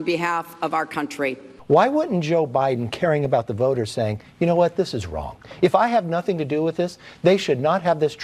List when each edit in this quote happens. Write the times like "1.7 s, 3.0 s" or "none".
1.5 s

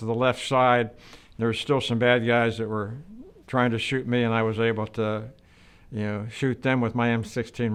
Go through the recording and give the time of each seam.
none

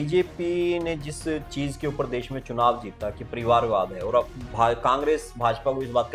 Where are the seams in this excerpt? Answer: none

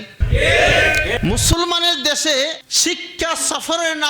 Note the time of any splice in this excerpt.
1.2 s

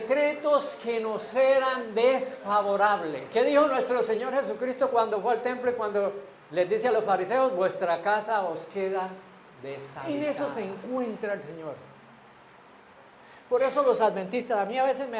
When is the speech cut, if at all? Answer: 3.2 s, 9.9 s

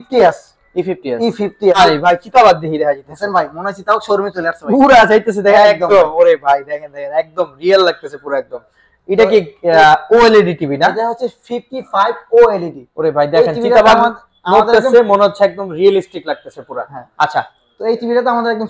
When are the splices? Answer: 1.8 s

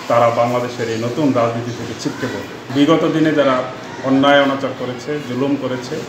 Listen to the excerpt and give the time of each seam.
2.6 s

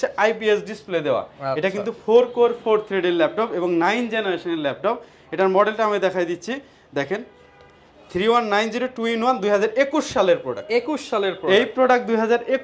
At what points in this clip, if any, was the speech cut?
none

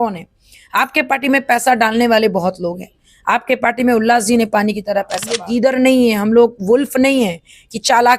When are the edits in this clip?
5.5 s

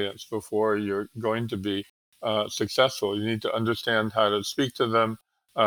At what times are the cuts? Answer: none

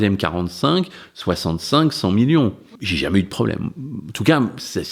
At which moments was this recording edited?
2.6 s

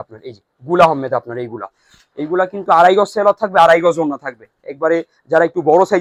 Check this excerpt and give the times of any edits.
none

